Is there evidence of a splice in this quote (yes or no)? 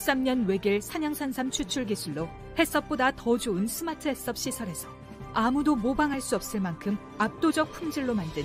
no